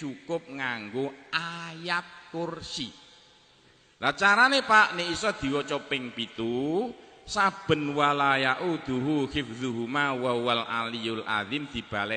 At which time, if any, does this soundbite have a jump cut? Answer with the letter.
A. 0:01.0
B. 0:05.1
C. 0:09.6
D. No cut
D